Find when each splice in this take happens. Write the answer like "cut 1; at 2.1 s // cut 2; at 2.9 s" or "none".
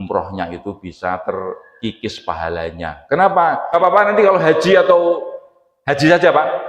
cut 1; at 3.7 s